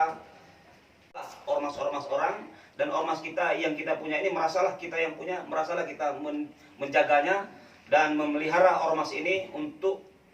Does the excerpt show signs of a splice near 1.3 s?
yes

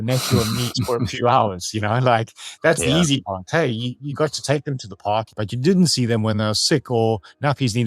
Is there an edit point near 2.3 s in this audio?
no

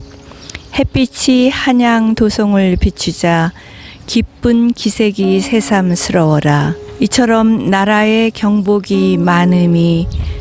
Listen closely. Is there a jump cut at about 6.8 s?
yes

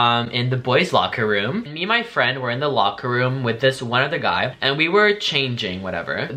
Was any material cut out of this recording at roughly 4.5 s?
yes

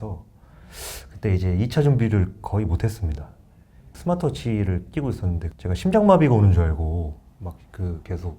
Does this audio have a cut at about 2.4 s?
no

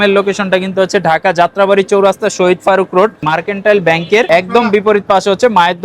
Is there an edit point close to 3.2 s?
yes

